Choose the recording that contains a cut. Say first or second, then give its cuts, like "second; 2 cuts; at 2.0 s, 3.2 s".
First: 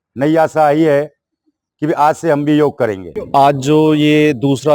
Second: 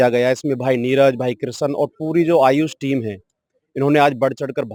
first; 1 cut; at 3.1 s